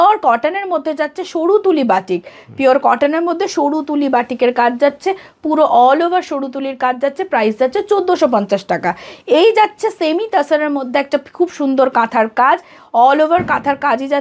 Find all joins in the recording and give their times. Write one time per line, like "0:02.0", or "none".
none